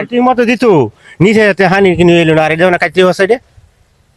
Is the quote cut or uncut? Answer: uncut